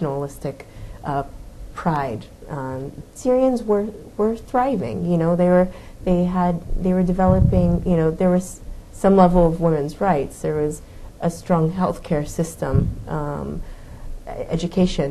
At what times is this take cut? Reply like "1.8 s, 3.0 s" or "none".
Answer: 3.0 s